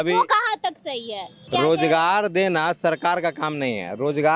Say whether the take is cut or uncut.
cut